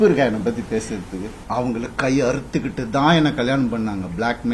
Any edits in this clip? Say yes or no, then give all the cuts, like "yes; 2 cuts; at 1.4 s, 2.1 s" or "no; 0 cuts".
yes; 1 cut; at 1.3 s